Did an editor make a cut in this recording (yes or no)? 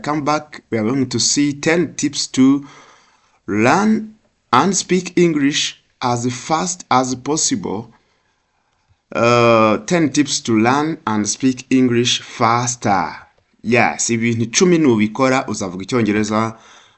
no